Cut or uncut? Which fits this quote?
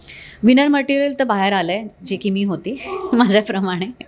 uncut